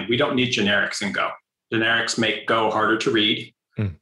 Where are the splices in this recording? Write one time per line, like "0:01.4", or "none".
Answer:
0:01.5